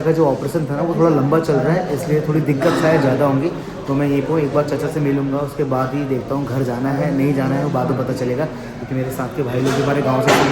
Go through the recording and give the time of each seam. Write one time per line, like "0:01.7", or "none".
none